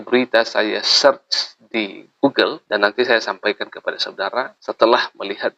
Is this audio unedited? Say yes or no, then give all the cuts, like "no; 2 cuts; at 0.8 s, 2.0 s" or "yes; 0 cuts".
yes; 0 cuts